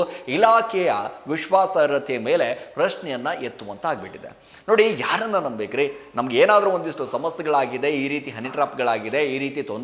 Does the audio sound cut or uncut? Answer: uncut